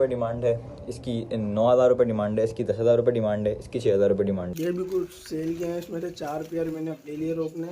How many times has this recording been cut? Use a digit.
1